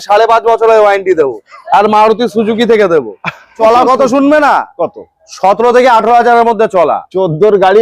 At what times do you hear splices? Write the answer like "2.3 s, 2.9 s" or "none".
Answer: 3.5 s

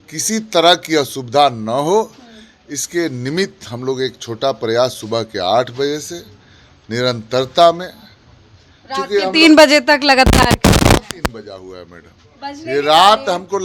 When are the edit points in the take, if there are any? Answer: none

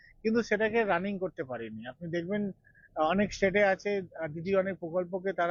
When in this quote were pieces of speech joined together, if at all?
none

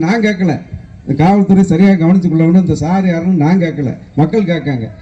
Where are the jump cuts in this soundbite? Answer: none

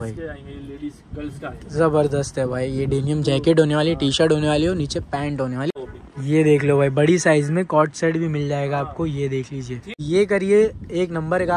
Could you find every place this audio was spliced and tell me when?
5.7 s, 9.9 s

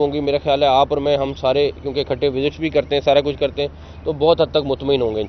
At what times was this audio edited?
none

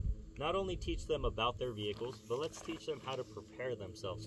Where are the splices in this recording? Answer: none

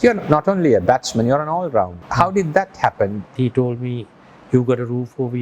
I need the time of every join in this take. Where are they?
2.0 s, 3.3 s

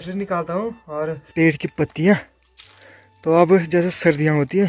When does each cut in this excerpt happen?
1.2 s

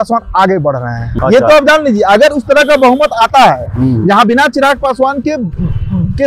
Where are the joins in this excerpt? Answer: 1.0 s

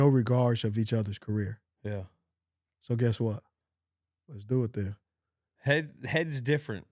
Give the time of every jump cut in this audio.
none

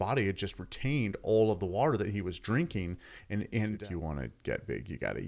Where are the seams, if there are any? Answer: 3.8 s

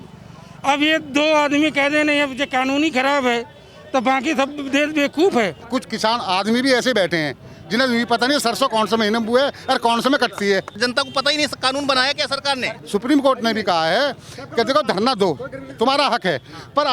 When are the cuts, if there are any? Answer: 5.6 s, 10.7 s, 12.8 s

